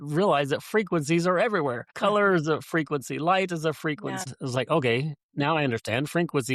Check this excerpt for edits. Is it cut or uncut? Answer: cut